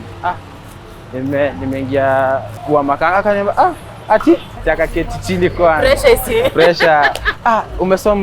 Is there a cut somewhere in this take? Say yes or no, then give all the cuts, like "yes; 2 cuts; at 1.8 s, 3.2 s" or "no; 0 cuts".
yes; 2 cuts; at 2.5 s, 4.5 s